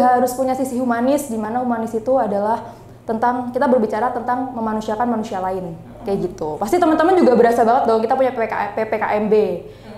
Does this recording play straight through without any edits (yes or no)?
yes